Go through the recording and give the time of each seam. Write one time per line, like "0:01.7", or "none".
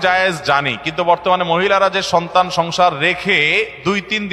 none